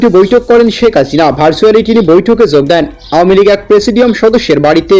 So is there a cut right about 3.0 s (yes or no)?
no